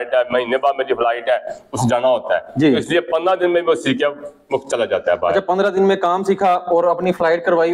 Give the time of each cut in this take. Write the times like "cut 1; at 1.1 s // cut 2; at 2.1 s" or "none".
none

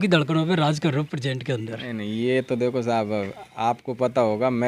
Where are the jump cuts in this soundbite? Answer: none

